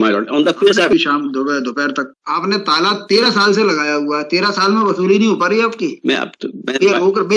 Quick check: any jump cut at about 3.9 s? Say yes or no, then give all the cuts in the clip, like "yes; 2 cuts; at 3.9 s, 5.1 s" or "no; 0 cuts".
no; 2 cuts; at 0.9 s, 2.1 s